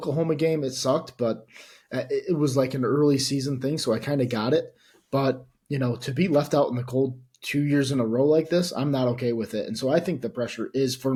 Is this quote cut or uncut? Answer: uncut